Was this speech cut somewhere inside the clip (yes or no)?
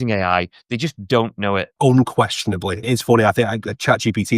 yes